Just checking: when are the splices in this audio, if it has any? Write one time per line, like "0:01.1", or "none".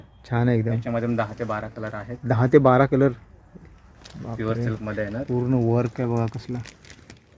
none